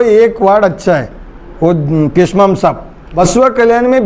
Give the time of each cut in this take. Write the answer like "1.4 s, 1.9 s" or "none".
3.0 s